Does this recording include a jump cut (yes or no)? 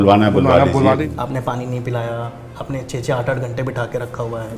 yes